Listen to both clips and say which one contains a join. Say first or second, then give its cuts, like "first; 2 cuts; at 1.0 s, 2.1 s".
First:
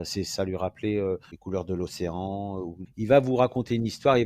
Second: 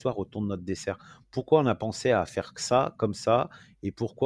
first; 2 cuts; at 1.3 s, 2.8 s